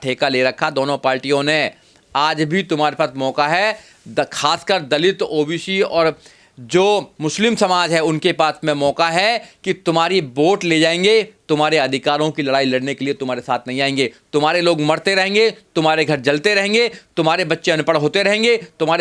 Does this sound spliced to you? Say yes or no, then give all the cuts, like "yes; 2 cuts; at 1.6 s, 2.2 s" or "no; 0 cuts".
no; 0 cuts